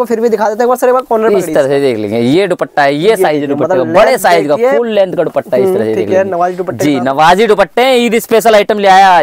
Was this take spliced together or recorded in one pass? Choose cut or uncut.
uncut